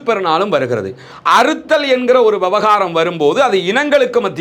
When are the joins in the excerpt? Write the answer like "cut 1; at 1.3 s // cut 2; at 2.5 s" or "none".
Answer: cut 1; at 1.1 s

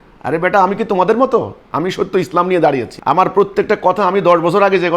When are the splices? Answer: cut 1; at 1.6 s // cut 2; at 2.9 s

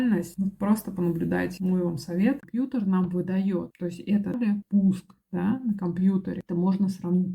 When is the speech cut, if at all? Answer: cut 1; at 2.4 s // cut 2; at 4.4 s

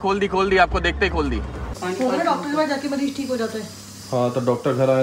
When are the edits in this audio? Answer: cut 1; at 1.7 s

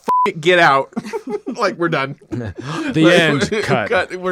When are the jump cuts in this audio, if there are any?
none

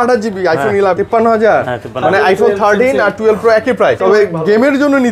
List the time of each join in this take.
cut 1; at 1.0 s // cut 2; at 4.0 s

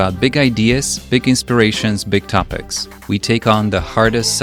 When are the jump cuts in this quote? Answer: none

